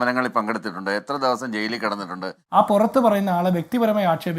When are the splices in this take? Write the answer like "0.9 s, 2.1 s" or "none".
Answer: 2.4 s